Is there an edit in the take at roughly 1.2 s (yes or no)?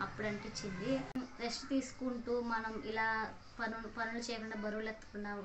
yes